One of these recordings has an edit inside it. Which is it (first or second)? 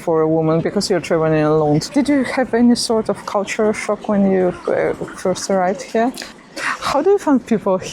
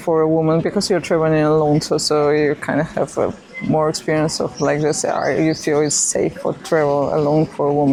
first